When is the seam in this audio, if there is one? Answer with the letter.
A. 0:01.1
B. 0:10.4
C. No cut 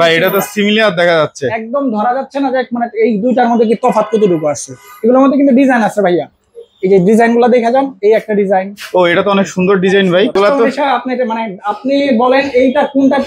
B